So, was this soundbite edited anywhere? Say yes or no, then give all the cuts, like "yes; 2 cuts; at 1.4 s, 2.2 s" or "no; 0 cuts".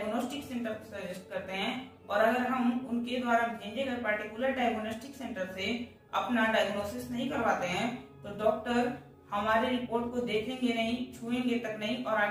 no; 0 cuts